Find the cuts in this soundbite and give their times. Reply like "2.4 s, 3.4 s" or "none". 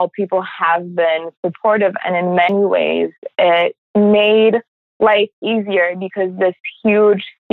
3.8 s, 4.8 s